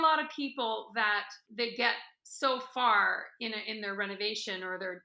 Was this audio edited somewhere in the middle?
no; 0 cuts

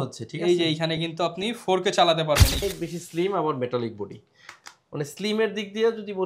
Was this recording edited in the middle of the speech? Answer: yes; 1 cut; at 2.6 s

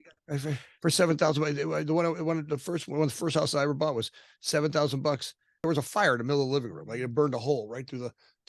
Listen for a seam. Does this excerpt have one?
yes; 1 cut; at 5.6 s

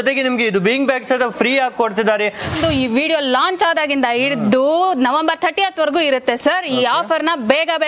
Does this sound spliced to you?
yes; 1 cut; at 2.5 s

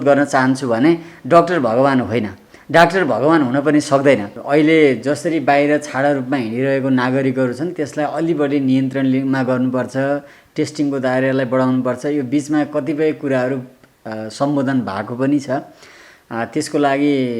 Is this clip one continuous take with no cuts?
no; 1 cut; at 4.3 s

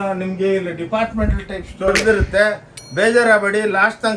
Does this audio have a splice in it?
yes; 1 cut; at 2.0 s

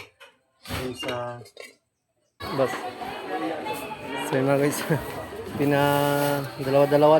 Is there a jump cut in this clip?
yes; 1 cut; at 2.4 s

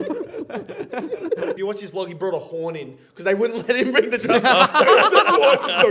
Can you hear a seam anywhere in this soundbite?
yes; 1 cut; at 1.6 s

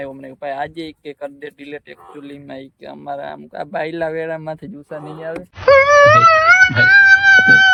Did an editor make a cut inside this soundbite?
no; 0 cuts

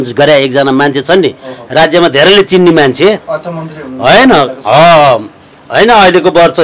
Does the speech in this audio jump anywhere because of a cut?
no; 0 cuts

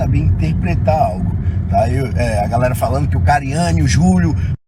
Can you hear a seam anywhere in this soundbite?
no; 0 cuts

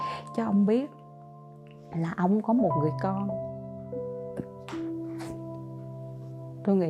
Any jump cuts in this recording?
no; 0 cuts

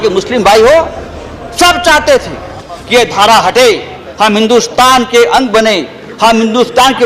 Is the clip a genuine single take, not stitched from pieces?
yes; 0 cuts

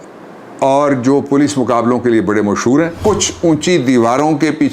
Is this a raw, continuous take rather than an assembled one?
no; 1 cut; at 2.9 s

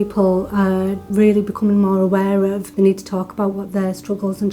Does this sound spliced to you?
yes; 2 cuts; at 1.0 s, 2.6 s

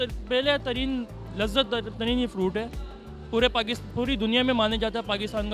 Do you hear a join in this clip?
no; 0 cuts

